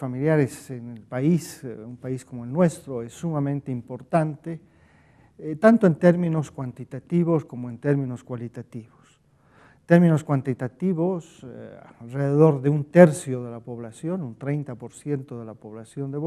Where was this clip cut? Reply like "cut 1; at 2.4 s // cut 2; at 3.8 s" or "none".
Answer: cut 1; at 7.7 s